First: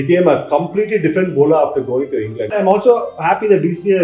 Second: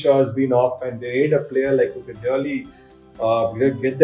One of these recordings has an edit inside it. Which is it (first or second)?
first